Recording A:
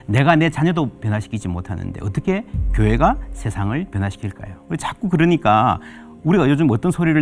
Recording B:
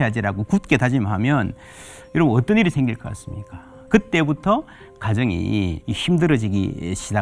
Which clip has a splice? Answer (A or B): B